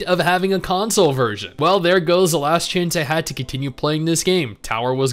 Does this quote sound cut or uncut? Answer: cut